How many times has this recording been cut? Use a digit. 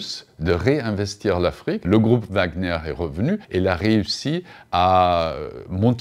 2